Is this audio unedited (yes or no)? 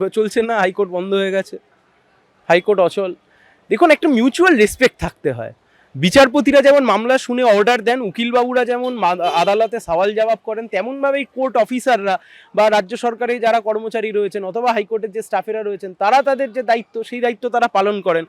yes